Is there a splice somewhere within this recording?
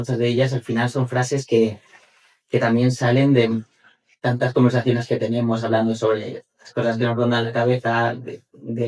no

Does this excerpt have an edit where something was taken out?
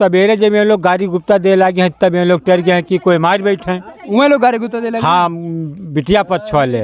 no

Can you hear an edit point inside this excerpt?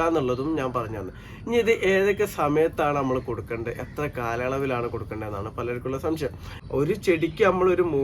yes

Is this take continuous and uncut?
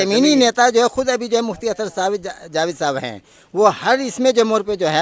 yes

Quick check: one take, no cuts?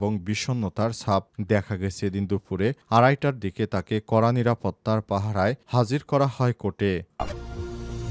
no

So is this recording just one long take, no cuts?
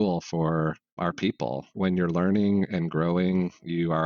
no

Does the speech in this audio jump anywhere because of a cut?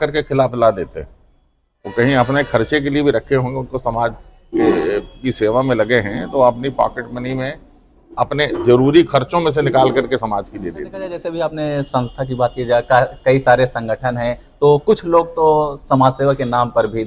yes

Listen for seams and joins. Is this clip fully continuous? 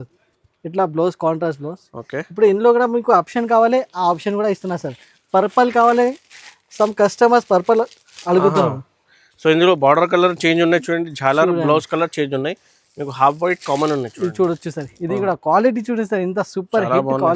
yes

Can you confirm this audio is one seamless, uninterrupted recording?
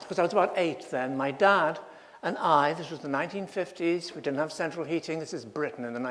no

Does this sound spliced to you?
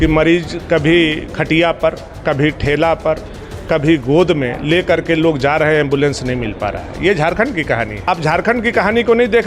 yes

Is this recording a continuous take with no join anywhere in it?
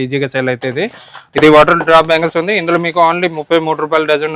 no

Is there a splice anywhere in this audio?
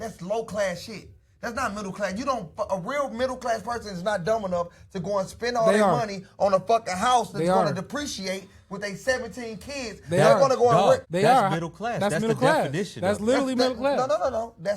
yes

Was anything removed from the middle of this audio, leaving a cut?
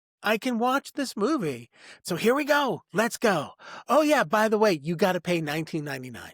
yes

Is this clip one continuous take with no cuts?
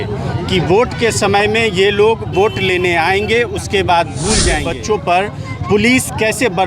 no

